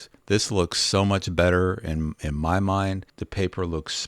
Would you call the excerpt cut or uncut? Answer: cut